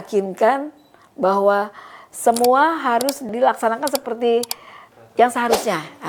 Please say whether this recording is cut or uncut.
uncut